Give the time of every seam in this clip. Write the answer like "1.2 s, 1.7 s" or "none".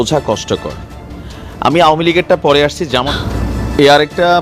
3.1 s